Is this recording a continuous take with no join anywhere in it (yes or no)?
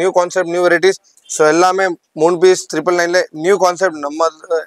yes